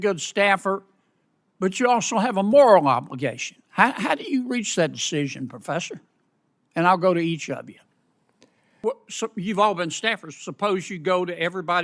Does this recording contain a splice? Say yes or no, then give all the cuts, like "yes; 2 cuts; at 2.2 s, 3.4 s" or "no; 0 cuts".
yes; 1 cut; at 8.6 s